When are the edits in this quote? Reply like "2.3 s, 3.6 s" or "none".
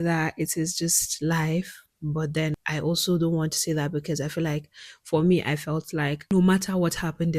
none